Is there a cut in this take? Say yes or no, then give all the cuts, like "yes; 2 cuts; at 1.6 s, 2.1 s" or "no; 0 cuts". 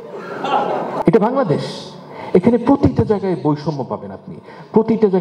yes; 1 cut; at 1.0 s